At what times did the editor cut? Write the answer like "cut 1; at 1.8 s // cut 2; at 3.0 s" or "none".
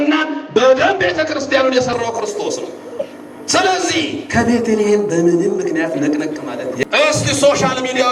cut 1; at 6.8 s

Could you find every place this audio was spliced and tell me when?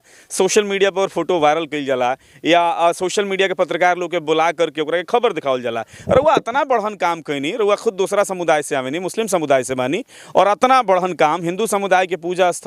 none

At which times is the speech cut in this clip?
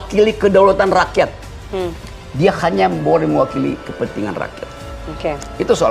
none

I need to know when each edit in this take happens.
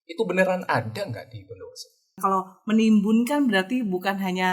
cut 1; at 2.2 s

